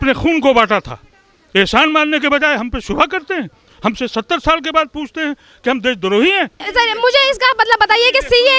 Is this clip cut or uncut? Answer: cut